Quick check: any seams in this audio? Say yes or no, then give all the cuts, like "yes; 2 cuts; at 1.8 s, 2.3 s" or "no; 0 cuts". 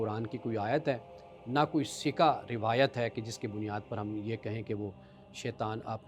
no; 0 cuts